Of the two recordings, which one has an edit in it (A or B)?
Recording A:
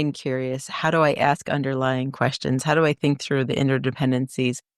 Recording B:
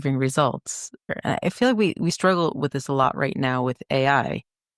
B